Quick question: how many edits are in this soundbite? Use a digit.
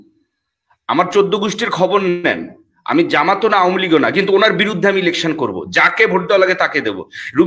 0